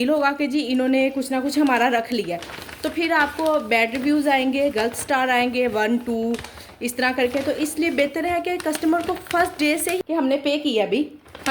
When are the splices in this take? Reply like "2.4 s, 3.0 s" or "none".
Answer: 10.0 s